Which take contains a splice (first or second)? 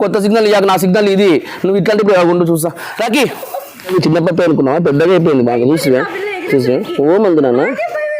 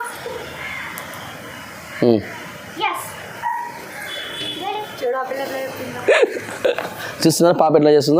first